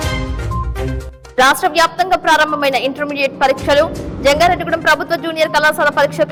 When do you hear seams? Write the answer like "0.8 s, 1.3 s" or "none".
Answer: none